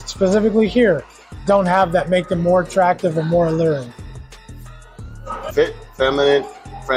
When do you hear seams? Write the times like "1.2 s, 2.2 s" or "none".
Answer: none